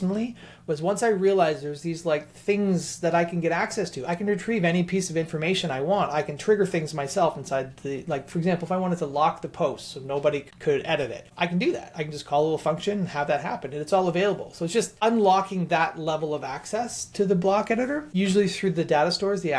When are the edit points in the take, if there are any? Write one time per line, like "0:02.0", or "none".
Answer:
none